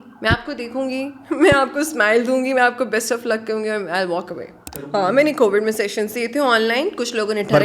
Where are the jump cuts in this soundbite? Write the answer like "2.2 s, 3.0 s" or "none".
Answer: 4.8 s